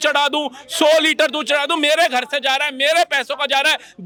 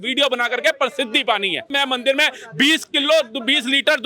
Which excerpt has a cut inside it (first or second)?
second